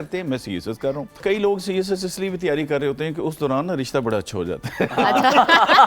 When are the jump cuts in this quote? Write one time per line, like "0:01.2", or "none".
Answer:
0:01.2